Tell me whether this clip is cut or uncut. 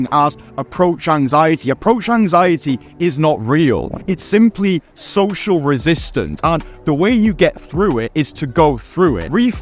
uncut